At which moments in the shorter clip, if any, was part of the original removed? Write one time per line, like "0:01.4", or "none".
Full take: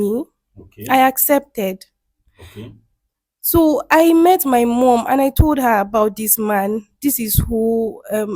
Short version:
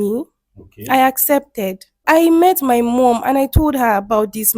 0:02.0